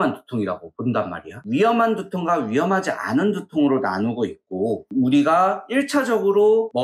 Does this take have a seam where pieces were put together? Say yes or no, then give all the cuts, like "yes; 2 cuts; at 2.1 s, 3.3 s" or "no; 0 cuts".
yes; 1 cut; at 1.4 s